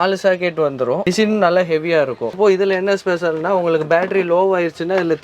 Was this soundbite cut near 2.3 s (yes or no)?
yes